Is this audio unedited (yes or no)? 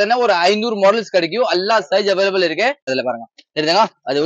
no